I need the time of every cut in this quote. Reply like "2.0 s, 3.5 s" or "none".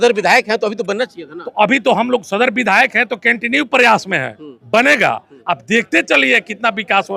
none